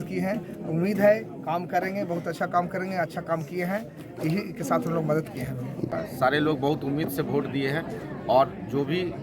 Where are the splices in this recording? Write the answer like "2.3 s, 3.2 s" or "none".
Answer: 5.9 s